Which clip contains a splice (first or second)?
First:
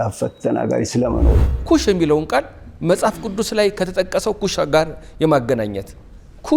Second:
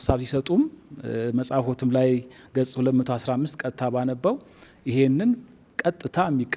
first